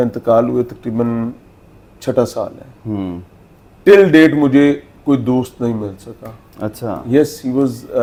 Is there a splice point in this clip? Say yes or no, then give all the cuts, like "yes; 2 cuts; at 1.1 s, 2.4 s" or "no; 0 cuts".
no; 0 cuts